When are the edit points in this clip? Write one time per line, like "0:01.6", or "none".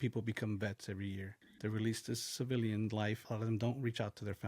0:01.4